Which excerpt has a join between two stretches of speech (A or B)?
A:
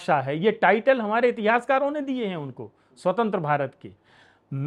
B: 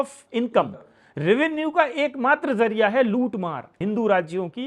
B